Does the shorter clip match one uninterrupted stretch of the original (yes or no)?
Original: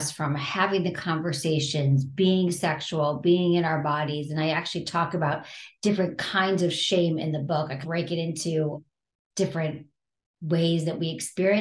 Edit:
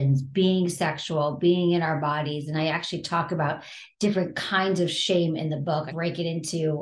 no